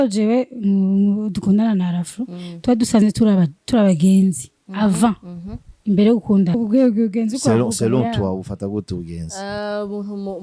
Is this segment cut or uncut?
cut